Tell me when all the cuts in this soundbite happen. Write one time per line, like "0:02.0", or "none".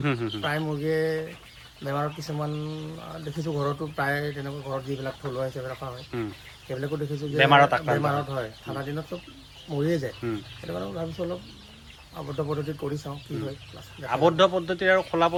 none